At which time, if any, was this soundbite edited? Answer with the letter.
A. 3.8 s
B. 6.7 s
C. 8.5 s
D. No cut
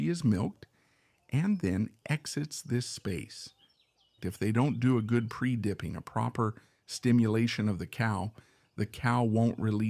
A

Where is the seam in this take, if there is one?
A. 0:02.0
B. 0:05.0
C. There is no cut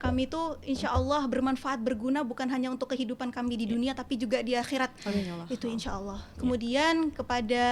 C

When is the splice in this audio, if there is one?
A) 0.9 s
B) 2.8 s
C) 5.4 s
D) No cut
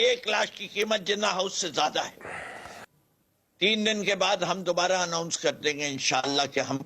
B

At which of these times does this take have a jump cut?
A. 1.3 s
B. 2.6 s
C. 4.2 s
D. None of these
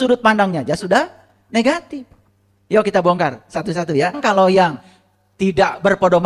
C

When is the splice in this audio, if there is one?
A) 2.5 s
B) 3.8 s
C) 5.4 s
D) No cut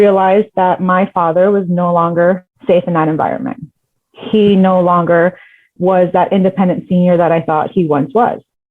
A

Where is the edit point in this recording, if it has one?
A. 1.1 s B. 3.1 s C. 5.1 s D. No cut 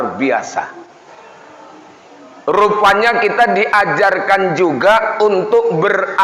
A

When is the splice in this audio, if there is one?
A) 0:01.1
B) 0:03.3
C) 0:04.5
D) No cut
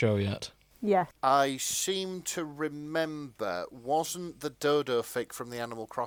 D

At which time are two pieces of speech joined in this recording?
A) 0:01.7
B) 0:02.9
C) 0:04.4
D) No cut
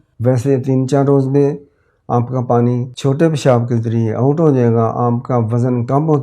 B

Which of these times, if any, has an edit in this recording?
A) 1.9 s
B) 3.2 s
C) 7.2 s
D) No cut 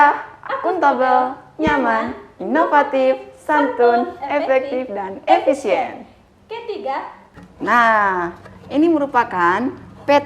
C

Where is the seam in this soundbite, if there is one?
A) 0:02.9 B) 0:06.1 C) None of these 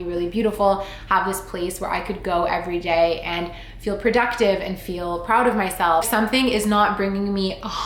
B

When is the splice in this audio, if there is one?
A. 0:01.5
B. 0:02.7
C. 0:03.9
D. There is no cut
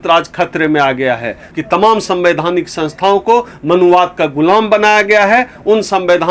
A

